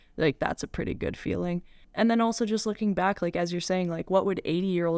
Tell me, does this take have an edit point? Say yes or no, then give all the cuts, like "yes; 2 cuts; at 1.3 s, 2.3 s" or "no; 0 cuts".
yes; 1 cut; at 1.8 s